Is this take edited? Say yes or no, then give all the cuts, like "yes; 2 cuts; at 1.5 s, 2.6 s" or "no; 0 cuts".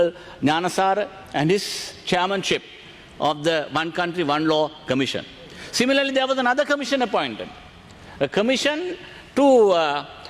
no; 0 cuts